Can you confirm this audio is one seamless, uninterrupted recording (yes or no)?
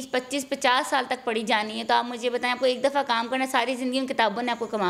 yes